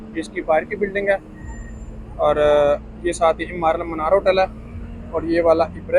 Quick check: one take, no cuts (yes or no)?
yes